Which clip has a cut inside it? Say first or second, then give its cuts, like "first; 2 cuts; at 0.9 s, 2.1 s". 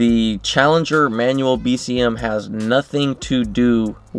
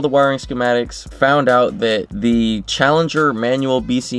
second; 1 cut; at 1.0 s